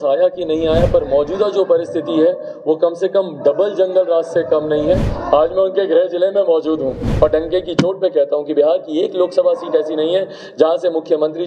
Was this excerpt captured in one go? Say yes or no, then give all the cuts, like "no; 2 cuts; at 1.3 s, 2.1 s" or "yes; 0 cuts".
no; 2 cuts; at 5.1 s, 7.0 s